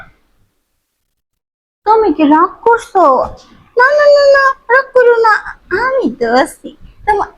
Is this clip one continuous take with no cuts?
yes; 0 cuts

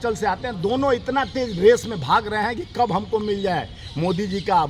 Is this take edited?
no; 0 cuts

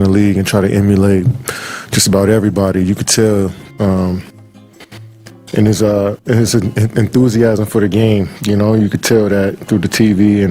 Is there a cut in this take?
no; 0 cuts

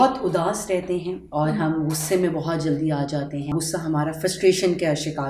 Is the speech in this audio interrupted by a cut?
yes; 1 cut; at 3.5 s

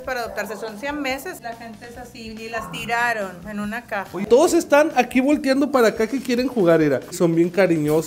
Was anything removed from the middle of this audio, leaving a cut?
yes; 3 cuts; at 1.4 s, 4.2 s, 7.1 s

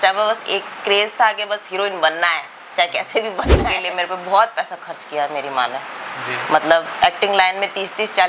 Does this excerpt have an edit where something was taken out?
yes; 1 cut; at 3.7 s

